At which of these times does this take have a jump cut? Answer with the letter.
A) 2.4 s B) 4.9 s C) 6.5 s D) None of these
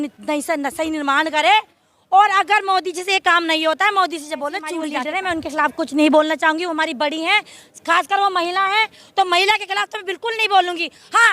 B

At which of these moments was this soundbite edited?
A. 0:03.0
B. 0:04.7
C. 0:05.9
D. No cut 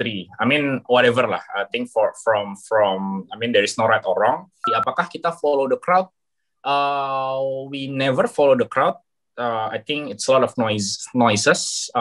B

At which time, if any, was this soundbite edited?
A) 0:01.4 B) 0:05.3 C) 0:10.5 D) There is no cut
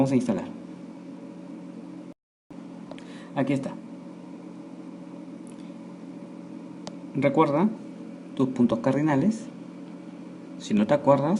B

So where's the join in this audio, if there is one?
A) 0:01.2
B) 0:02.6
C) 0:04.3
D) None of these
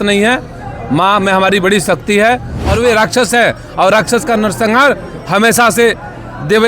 B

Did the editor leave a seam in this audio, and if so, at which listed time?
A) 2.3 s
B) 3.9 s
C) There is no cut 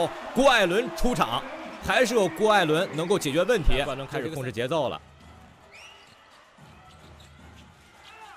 B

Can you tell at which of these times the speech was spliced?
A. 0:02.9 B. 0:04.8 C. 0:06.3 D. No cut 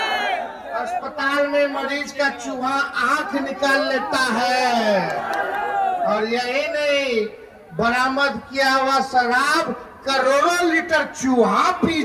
D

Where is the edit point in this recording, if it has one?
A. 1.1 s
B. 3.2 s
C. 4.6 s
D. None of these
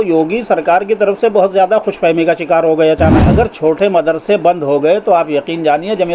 B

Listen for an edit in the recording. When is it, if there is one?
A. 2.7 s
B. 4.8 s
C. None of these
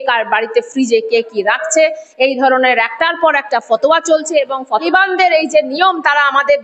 B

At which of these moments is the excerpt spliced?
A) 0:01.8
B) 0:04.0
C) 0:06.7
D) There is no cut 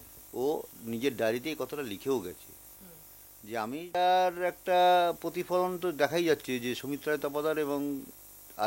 B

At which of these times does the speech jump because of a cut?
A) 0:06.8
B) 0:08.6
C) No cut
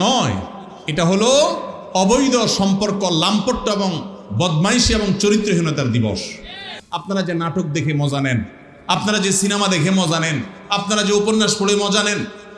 A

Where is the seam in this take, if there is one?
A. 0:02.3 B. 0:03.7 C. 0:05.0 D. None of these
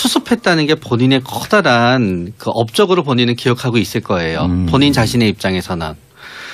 D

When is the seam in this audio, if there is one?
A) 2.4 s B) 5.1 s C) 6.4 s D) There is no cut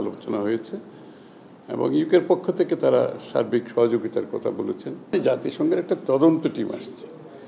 B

